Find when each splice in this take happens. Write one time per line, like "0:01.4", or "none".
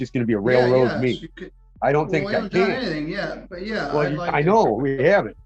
none